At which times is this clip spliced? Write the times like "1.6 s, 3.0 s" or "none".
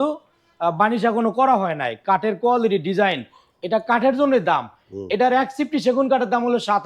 none